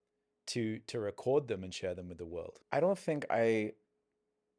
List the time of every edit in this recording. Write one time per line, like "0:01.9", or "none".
0:02.5